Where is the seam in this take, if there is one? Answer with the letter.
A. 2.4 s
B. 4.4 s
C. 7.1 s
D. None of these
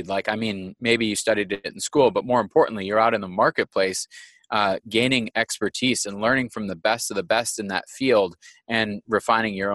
D